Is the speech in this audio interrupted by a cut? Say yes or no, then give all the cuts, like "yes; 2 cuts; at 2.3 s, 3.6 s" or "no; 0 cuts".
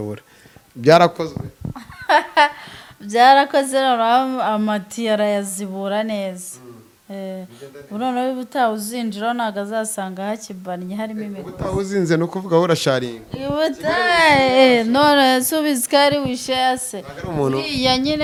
no; 0 cuts